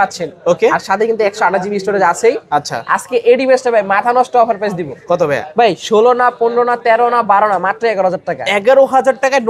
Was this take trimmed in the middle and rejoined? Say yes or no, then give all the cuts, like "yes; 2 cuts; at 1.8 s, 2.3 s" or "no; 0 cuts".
no; 0 cuts